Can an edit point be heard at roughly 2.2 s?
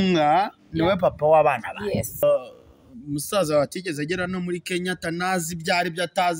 yes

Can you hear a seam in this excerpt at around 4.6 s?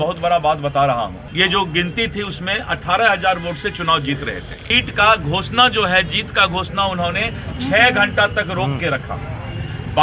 yes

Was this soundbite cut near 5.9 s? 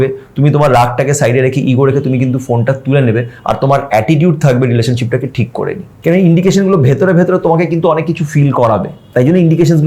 yes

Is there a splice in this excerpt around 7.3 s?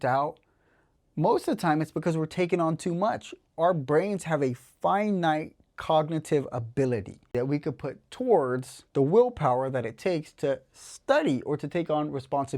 yes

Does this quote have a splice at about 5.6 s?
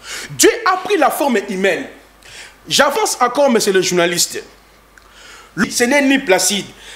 yes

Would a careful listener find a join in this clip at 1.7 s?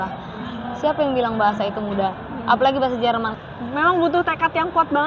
no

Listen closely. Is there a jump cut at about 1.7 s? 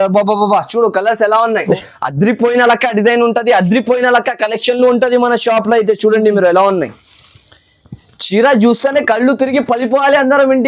yes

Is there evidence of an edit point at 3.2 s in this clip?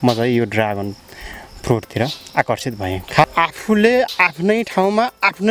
yes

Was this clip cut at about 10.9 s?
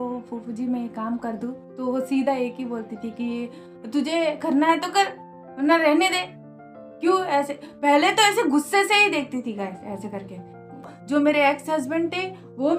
yes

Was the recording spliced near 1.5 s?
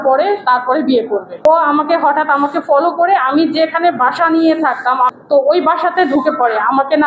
yes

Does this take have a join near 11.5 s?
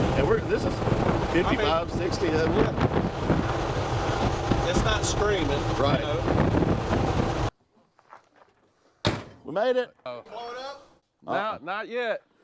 no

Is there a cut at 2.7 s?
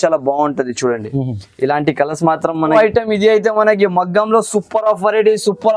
yes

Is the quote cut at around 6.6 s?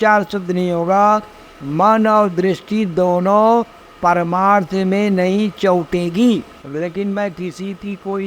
yes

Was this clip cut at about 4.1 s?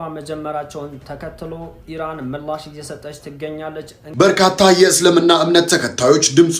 yes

